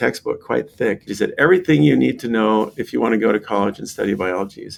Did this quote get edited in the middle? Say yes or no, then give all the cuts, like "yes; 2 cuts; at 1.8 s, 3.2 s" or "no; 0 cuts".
no; 0 cuts